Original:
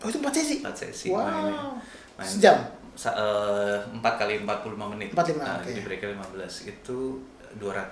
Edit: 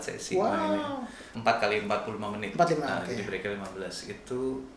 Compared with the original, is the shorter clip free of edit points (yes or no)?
no